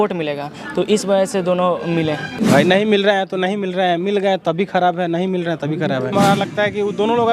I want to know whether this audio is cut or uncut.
cut